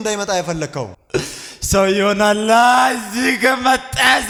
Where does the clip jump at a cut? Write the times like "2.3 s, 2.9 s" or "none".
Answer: none